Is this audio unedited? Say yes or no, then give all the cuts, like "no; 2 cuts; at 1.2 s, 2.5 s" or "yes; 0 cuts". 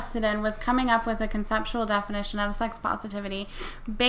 yes; 0 cuts